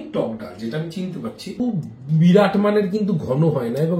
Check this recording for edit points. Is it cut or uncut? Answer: cut